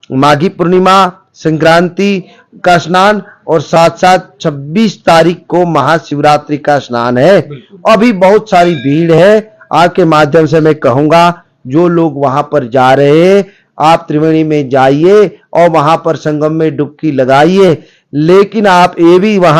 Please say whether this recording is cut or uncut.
uncut